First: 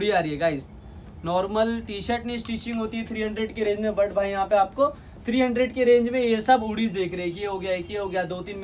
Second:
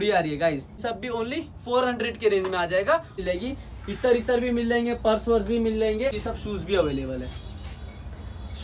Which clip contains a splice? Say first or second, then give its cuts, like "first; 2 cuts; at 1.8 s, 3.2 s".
second; 3 cuts; at 0.8 s, 3.2 s, 6.2 s